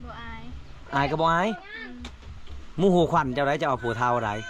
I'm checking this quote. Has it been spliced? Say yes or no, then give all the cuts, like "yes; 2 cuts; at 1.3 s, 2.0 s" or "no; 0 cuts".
no; 0 cuts